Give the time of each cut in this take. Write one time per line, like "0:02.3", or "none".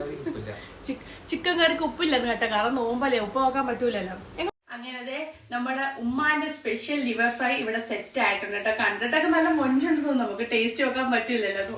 0:04.5